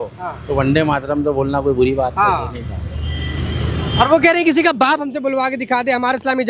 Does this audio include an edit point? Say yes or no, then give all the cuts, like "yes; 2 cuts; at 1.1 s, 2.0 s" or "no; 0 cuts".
no; 0 cuts